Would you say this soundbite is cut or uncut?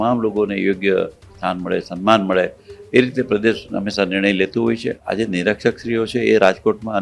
cut